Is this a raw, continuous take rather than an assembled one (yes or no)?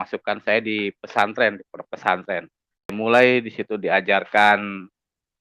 no